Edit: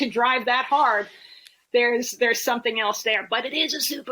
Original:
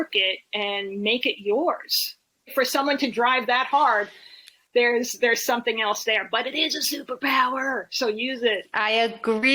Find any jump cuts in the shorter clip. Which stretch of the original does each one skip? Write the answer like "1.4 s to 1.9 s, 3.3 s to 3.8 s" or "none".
none